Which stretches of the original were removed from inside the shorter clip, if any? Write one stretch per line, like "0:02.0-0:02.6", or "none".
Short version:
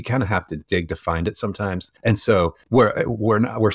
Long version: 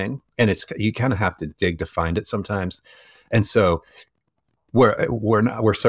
0:02.8-0:03.2
0:03.9-0:04.6